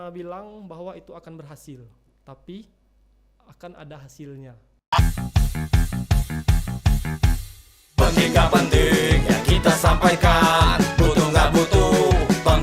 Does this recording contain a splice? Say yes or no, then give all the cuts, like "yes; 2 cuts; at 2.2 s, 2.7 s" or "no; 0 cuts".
yes; 1 cut; at 4.8 s